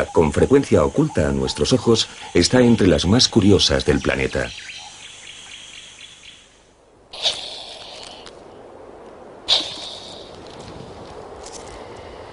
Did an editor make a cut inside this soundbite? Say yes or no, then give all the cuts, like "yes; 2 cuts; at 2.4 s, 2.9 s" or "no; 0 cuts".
yes; 1 cut; at 3.0 s